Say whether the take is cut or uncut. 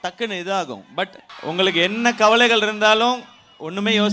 cut